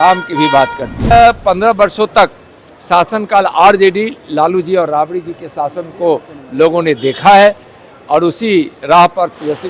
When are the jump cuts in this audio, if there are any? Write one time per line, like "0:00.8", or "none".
0:01.1